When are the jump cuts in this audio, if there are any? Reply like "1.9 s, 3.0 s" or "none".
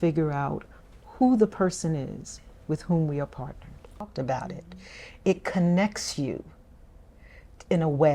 4.1 s